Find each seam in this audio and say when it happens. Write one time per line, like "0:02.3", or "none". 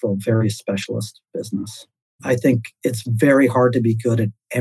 0:02.7